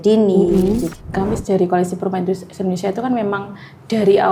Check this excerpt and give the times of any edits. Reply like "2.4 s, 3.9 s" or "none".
0.9 s